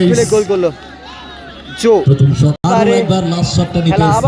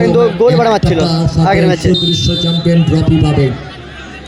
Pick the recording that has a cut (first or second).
first